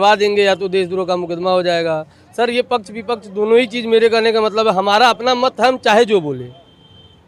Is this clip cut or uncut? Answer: uncut